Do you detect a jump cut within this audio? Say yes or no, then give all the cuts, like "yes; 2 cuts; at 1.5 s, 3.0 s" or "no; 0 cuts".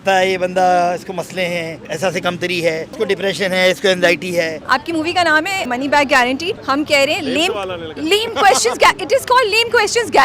yes; 5 cuts; at 1.9 s, 2.9 s, 4.6 s, 5.7 s, 6.6 s